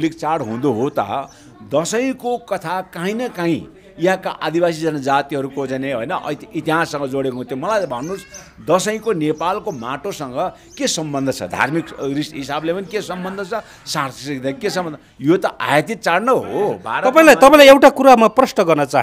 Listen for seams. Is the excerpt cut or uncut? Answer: uncut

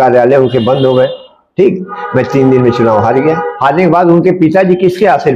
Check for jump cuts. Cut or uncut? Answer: cut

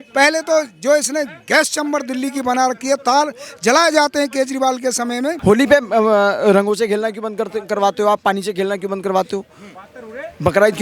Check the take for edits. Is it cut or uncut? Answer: cut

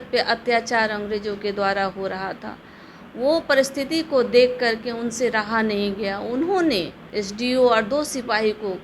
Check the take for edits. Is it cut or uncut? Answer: cut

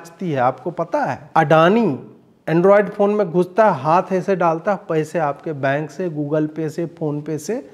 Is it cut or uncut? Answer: cut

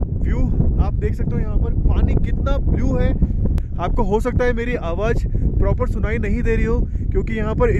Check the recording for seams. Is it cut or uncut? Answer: cut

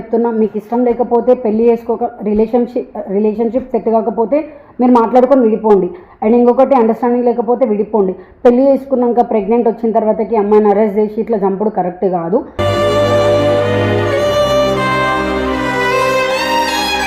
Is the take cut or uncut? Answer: uncut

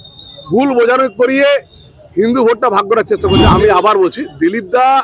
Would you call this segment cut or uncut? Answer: cut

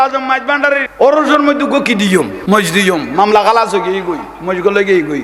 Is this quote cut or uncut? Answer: cut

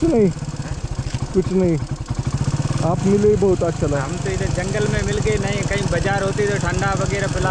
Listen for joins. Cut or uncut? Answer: uncut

